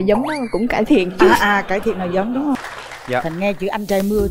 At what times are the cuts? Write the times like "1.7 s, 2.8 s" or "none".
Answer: 2.6 s